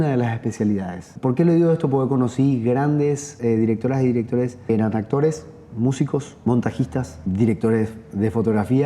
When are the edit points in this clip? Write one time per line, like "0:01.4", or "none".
0:01.0
0:03.4